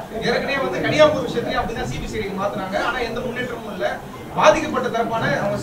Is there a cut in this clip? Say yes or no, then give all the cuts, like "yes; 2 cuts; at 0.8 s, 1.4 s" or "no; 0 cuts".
no; 0 cuts